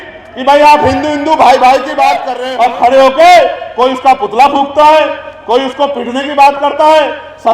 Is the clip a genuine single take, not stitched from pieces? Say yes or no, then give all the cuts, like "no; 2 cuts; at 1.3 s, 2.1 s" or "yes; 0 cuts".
no; 1 cut; at 2.4 s